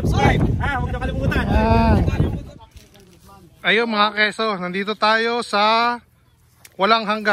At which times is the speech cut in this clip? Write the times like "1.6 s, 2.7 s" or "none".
2.4 s